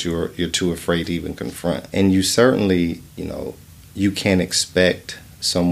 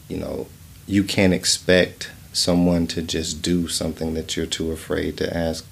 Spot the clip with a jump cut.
first; 1 cut; at 1.9 s

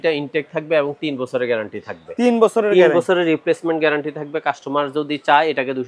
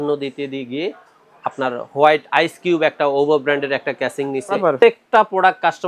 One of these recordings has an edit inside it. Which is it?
second; 1 cut; at 4.5 s

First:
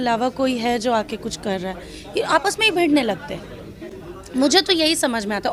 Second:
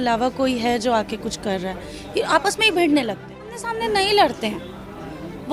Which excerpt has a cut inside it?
second; 1 cut; at 3.6 s

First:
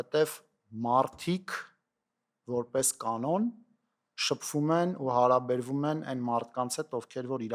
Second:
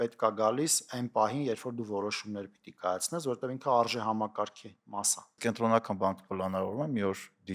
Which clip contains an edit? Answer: second; 1 cut; at 5.4 s

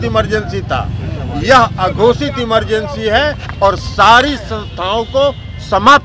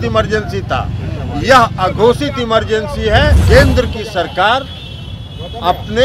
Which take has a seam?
second; 1 cut; at 3.4 s

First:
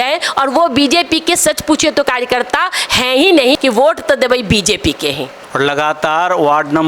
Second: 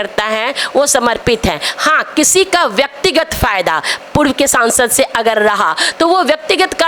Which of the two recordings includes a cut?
first; 2 cuts; at 3.6 s, 5.4 s

